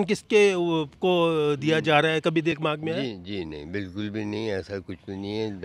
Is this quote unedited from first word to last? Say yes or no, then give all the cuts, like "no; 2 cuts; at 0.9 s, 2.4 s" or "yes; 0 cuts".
yes; 0 cuts